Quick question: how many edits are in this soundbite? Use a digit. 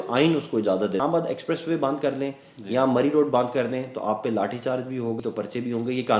2